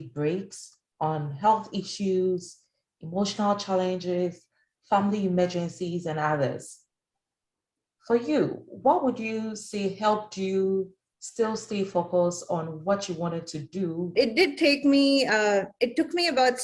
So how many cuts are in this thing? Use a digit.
1